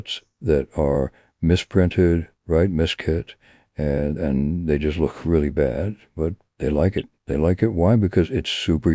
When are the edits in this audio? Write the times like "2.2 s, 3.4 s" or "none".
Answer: none